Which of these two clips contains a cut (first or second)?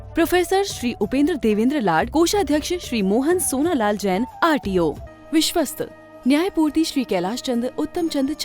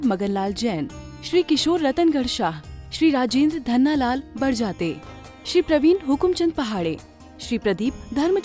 first